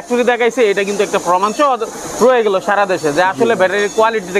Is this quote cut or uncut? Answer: uncut